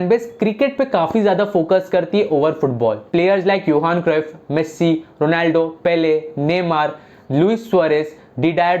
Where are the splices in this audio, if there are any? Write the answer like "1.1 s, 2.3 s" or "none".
3.0 s